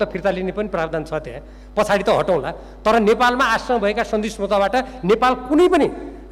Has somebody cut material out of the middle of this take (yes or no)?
no